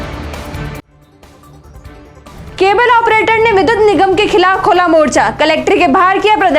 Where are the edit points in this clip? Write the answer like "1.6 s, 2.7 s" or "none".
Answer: none